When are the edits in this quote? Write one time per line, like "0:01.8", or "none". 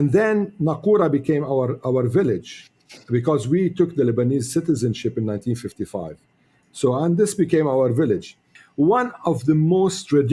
0:08.5